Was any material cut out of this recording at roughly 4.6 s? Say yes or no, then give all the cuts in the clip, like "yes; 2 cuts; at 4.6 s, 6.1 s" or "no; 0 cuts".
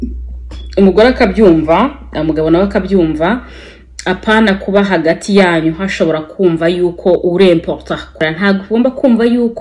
no; 1 cut; at 8.1 s